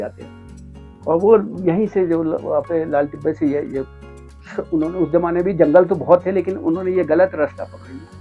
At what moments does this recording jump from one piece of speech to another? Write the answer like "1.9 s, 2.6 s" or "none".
none